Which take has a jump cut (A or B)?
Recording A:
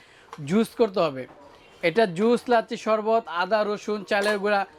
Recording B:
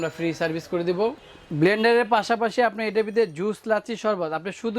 B